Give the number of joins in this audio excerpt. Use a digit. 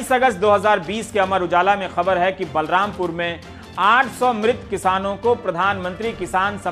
0